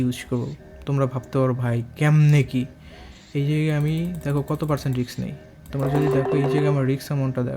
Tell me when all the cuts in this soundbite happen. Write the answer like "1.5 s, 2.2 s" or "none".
6.7 s